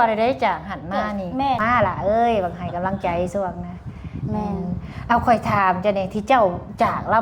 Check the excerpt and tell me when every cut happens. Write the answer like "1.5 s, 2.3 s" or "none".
1.6 s